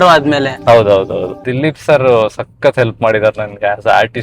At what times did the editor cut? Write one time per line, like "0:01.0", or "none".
0:01.6